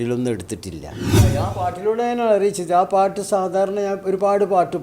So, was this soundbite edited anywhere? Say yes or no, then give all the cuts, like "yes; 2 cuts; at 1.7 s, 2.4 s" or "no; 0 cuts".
yes; 1 cut; at 1.2 s